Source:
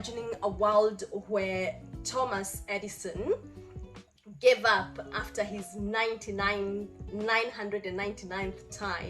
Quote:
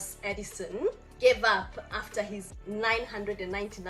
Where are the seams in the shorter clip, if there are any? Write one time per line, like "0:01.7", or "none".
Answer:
0:01.1
0:02.5